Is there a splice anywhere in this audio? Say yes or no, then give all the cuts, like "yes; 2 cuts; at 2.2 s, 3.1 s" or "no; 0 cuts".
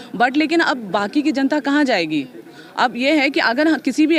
no; 0 cuts